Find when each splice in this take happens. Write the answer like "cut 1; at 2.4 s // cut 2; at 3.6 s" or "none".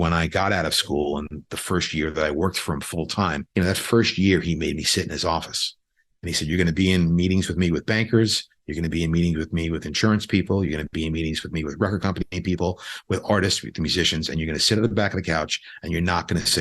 cut 1; at 3.4 s